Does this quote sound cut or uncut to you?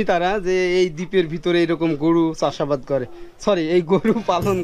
uncut